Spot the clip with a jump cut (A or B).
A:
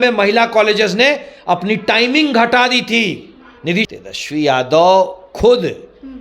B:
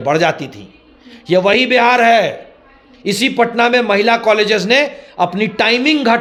A